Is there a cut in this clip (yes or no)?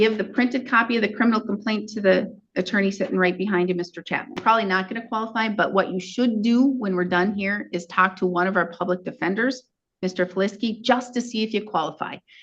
yes